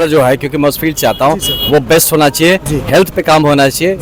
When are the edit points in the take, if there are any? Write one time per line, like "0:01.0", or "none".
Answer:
none